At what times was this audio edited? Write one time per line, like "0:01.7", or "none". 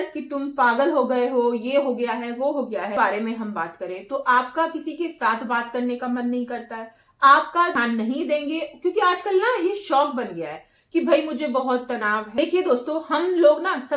0:03.0
0:07.8
0:12.3